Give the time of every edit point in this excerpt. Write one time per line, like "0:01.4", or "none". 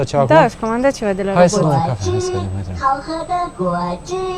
none